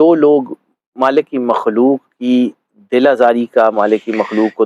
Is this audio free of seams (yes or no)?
yes